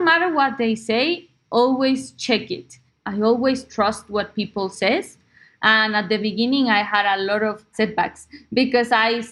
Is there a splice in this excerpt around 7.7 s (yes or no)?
yes